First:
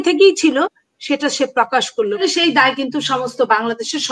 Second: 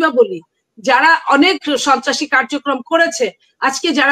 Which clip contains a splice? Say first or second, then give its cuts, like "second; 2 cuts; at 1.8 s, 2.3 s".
first; 1 cut; at 2.2 s